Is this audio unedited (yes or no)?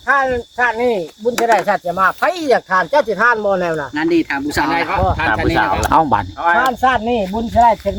yes